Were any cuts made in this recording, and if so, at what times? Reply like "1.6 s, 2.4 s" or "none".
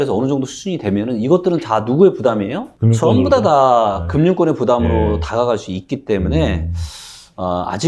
none